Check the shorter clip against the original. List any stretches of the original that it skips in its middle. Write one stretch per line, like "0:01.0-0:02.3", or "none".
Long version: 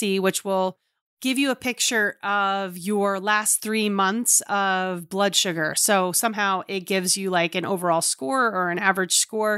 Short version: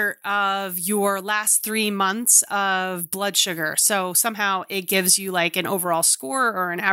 none